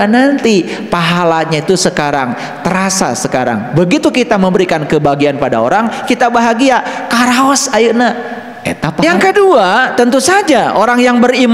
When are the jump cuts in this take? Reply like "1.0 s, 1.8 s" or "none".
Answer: 9.0 s